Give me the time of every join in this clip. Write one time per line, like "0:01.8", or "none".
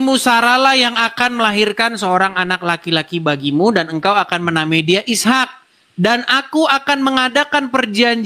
none